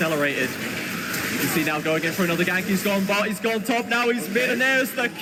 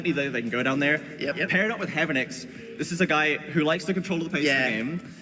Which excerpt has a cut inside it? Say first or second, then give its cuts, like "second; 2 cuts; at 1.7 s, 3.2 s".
second; 1 cut; at 1.3 s